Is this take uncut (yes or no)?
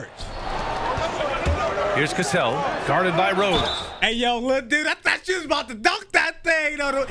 yes